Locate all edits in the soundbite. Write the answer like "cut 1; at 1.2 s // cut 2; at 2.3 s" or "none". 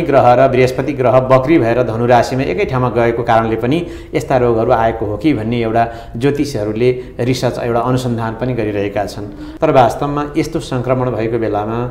cut 1; at 9.4 s

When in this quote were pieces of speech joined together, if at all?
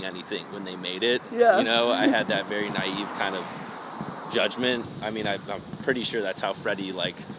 cut 1; at 4.9 s

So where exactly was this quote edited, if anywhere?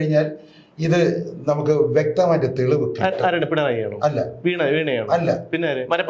none

